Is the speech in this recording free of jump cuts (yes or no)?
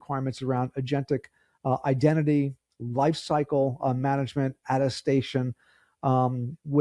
yes